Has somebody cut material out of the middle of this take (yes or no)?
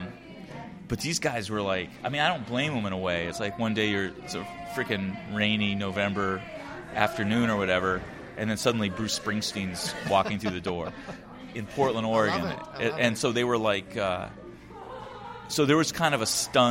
no